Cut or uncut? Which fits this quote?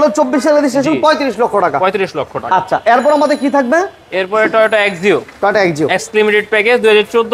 uncut